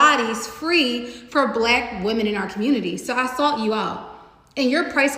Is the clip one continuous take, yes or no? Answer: yes